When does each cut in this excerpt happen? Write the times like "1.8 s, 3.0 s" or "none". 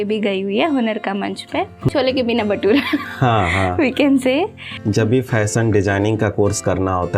1.8 s, 4.7 s